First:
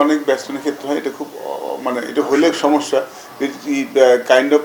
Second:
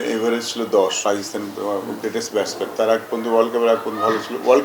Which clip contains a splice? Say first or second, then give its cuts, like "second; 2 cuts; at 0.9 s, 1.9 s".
second; 2 cuts; at 1.0 s, 2.7 s